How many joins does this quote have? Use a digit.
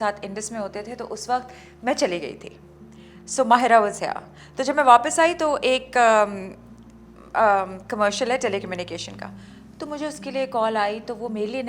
0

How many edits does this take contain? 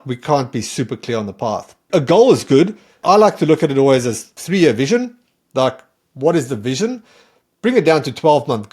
3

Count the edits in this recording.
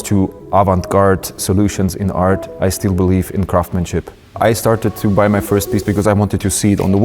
2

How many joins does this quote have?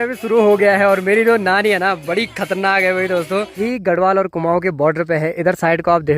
1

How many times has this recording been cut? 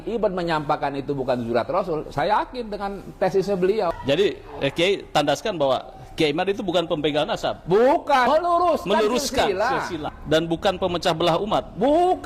2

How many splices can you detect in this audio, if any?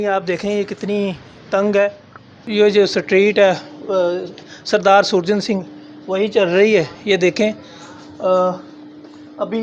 1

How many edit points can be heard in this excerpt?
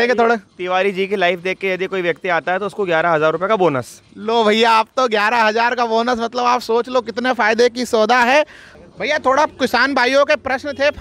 1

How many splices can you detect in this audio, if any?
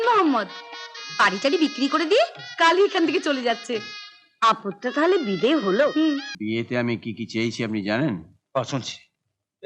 1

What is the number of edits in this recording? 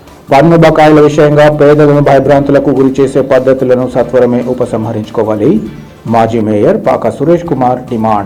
0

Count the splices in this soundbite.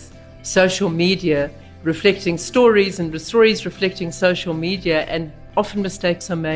1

